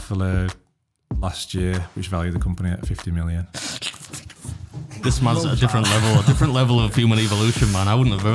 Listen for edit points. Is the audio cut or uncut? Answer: cut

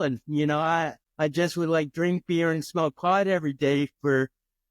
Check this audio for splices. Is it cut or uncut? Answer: cut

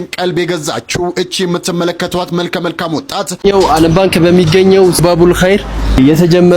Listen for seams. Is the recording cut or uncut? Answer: cut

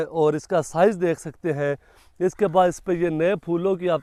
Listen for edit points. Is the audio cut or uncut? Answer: uncut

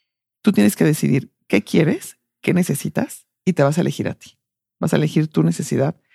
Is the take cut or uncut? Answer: uncut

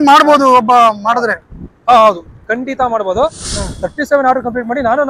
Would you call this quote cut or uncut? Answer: cut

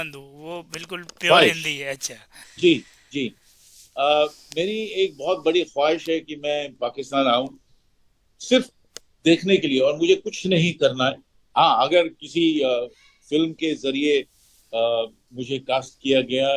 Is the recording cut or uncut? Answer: uncut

